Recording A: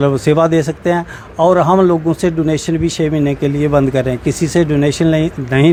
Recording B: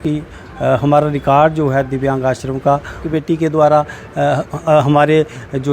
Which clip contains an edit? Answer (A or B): B